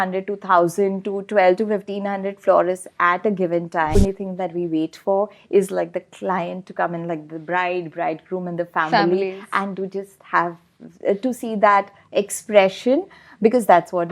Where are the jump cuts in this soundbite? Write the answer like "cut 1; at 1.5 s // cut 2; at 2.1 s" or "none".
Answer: cut 1; at 3.9 s